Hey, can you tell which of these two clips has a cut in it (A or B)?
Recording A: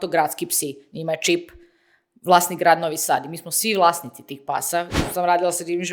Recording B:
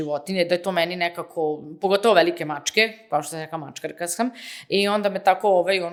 A